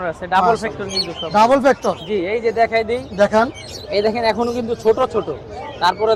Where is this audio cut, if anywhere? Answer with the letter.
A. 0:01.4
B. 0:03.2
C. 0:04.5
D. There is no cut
D